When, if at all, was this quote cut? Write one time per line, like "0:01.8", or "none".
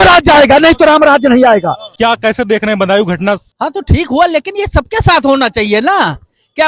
0:01.8
0:03.5